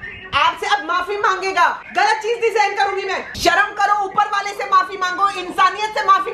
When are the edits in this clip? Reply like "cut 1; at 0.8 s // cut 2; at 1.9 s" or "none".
cut 1; at 1.8 s // cut 2; at 3.3 s